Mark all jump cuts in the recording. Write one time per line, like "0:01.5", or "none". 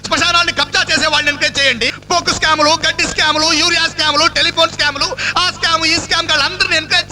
0:02.0